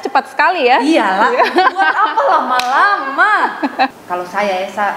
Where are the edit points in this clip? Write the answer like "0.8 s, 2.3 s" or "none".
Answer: 3.9 s

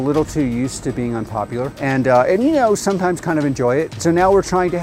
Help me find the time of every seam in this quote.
1.7 s, 3.9 s

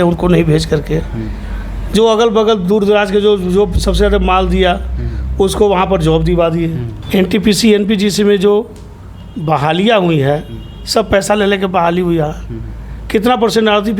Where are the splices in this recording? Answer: 6.9 s

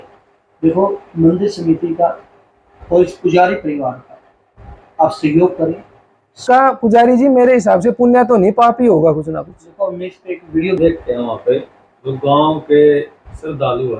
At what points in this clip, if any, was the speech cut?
6.4 s, 10.8 s

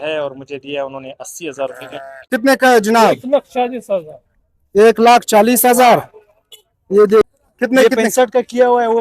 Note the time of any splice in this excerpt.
2.2 s, 7.2 s

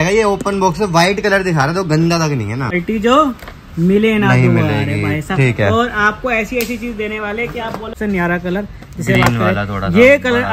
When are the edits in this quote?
2.7 s, 7.9 s

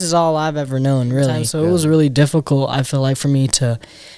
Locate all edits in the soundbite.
1.5 s

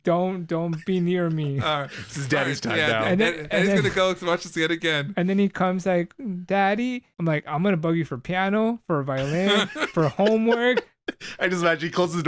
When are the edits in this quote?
7.1 s, 10.9 s

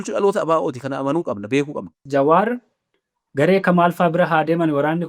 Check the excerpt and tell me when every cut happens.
1.9 s

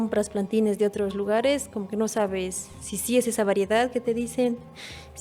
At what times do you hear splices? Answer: none

